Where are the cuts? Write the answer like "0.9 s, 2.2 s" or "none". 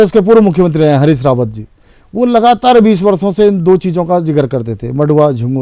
none